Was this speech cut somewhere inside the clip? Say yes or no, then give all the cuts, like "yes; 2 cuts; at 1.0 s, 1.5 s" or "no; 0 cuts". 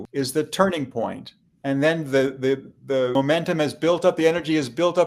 no; 0 cuts